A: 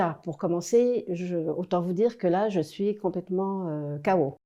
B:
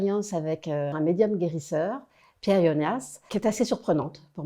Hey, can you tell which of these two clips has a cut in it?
B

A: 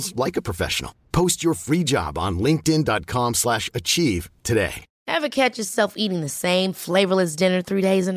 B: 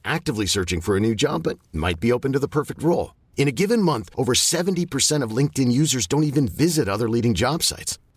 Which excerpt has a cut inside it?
A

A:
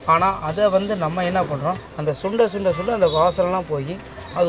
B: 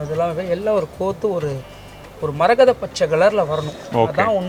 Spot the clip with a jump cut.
A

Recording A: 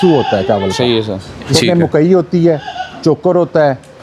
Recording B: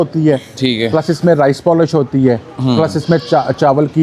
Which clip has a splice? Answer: A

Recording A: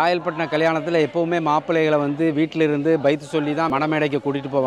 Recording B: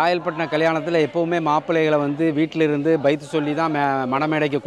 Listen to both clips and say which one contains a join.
A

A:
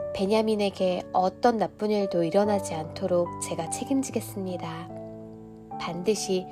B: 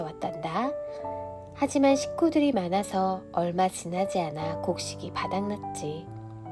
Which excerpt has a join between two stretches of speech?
A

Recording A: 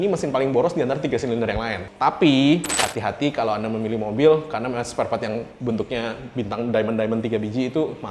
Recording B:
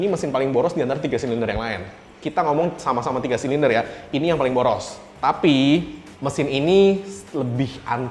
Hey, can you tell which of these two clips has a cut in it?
A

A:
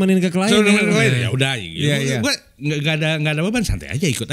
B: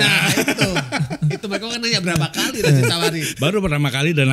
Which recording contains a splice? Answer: B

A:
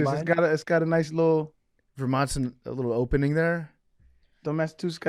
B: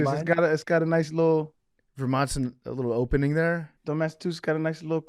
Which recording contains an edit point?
B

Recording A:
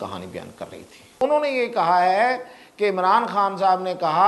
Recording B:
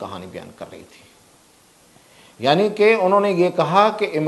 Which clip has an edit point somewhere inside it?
A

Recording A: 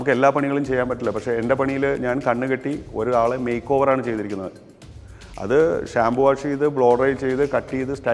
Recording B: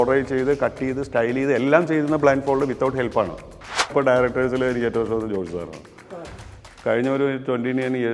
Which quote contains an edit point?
B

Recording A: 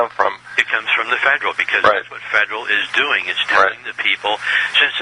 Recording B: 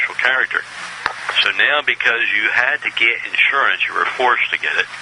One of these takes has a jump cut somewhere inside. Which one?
A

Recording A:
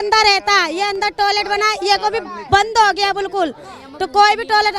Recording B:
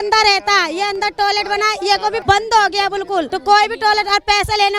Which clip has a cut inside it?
B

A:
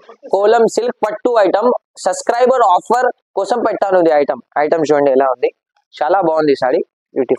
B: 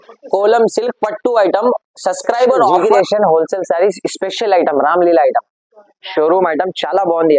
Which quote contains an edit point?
B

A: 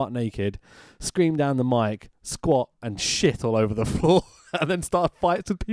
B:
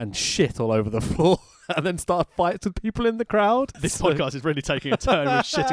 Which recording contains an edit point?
B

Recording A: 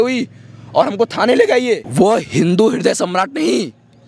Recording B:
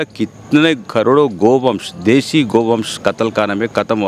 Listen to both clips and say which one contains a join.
A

